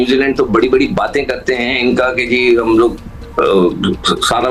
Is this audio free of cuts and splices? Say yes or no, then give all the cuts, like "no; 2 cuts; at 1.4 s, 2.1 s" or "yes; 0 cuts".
yes; 0 cuts